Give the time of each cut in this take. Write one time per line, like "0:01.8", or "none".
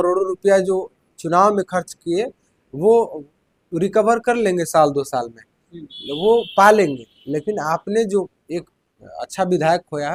none